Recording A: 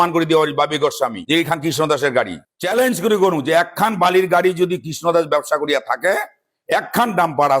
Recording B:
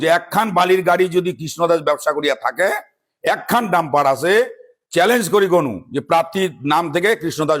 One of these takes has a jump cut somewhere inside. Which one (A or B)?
A